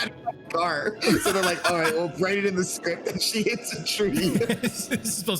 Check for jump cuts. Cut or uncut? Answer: cut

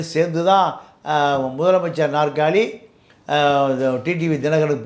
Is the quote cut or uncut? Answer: uncut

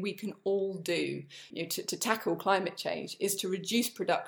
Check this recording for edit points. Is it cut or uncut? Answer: cut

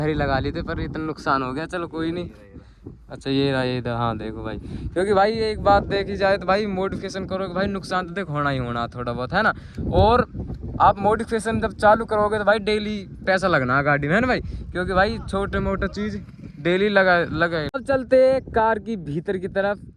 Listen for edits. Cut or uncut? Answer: uncut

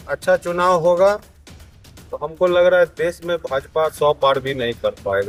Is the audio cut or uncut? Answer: uncut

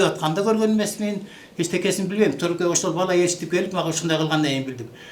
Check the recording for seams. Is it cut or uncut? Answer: uncut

